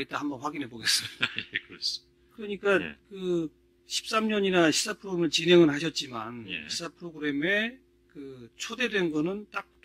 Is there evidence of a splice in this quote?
no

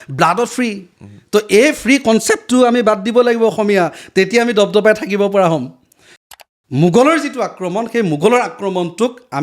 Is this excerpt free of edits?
no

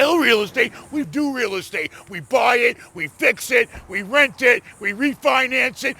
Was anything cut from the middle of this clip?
yes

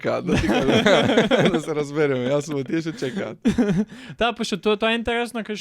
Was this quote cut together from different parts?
no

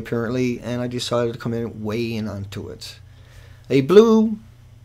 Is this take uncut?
no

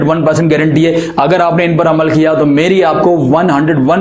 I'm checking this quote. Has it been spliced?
no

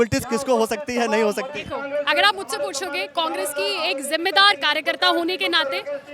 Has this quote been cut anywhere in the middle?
no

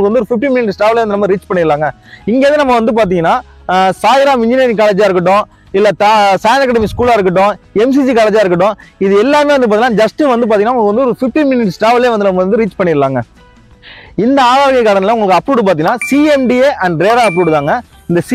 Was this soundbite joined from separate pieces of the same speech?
no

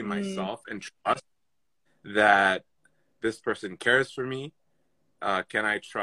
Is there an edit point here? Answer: no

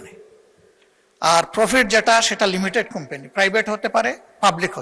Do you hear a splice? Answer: no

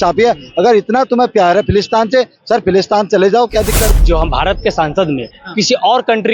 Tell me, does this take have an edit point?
yes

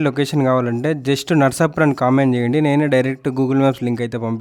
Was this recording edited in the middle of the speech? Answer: no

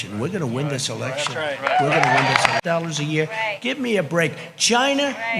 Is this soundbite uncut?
no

